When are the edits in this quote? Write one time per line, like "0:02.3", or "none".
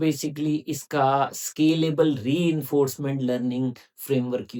none